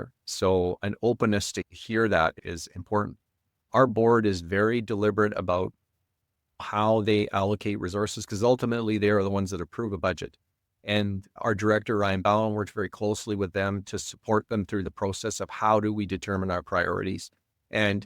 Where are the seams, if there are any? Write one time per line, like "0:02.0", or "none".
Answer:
0:02.4
0:06.6